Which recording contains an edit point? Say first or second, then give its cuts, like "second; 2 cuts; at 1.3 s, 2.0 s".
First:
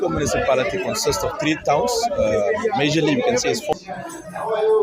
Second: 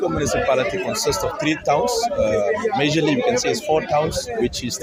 first; 1 cut; at 3.7 s